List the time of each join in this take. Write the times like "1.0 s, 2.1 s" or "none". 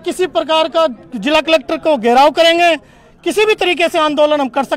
none